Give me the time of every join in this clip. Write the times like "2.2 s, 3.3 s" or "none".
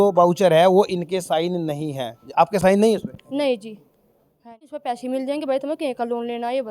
4.7 s